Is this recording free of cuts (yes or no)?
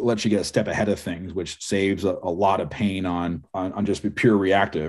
no